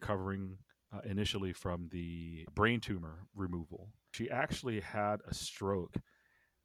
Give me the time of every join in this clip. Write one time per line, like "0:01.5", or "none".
0:02.4
0:04.1